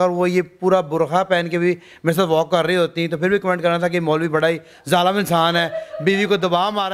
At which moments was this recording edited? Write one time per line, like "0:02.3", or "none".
none